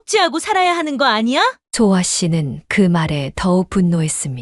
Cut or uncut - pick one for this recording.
uncut